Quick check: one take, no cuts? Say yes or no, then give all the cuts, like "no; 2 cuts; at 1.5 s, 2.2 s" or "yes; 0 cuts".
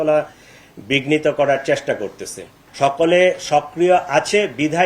no; 1 cut; at 2.5 s